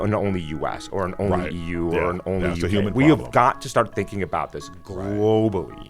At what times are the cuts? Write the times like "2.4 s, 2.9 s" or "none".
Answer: none